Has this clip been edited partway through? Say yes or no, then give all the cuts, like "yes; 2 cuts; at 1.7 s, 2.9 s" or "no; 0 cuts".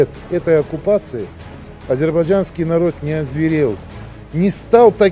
no; 0 cuts